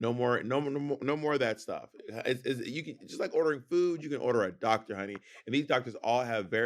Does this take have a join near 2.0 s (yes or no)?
no